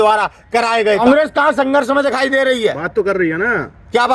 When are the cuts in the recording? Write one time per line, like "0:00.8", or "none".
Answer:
0:01.0